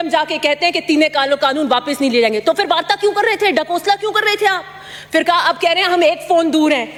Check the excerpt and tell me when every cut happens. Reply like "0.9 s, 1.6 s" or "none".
none